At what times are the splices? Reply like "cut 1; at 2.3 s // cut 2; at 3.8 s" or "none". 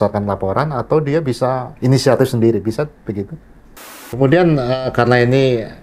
cut 1; at 1.7 s // cut 2; at 4.0 s